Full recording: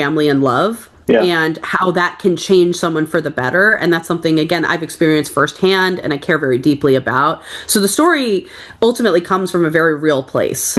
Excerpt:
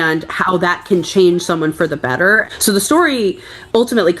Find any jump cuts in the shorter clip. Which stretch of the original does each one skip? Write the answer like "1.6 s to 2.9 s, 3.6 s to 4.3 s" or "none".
3.8 s to 7.5 s